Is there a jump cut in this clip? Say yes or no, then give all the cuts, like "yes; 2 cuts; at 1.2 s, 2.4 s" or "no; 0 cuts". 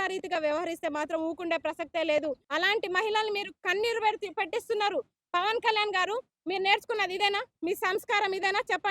yes; 1 cut; at 2.4 s